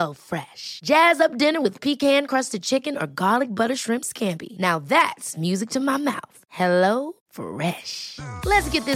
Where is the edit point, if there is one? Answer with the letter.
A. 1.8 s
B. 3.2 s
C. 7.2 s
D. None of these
D